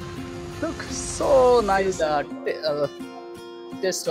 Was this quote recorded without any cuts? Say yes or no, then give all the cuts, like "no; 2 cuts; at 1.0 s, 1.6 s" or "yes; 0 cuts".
no; 1 cut; at 1.8 s